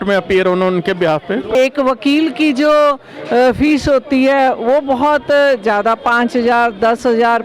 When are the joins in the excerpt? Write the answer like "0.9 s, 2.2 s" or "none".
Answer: 1.5 s